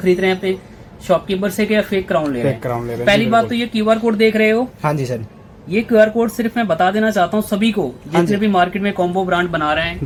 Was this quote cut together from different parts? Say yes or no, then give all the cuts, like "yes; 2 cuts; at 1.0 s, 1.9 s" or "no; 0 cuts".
no; 0 cuts